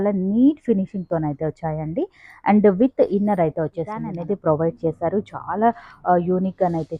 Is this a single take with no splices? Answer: no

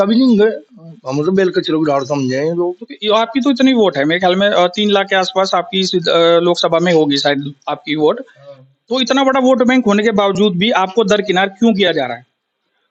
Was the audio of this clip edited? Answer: no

